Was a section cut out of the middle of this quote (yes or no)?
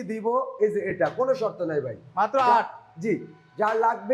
no